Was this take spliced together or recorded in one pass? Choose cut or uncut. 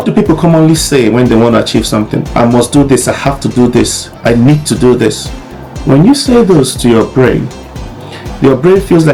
uncut